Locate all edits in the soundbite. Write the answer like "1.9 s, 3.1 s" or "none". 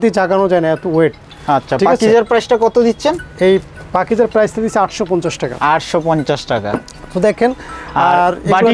none